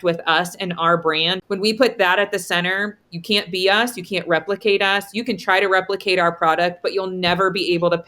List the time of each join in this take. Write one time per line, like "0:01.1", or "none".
0:01.3